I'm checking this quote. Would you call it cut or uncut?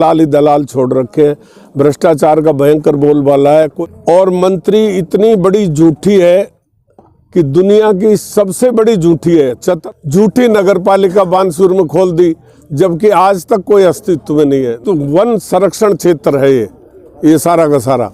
cut